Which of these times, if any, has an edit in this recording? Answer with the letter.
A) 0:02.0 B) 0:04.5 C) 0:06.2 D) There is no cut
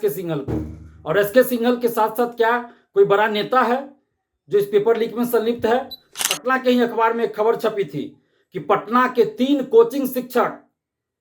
C